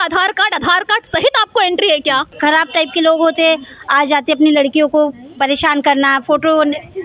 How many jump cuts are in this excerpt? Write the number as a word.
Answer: one